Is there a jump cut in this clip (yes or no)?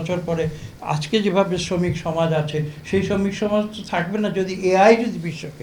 no